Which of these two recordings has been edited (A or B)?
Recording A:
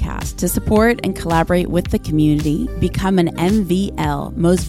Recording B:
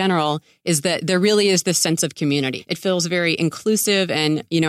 B